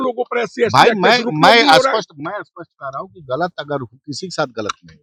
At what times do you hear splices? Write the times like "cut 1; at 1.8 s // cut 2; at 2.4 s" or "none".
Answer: none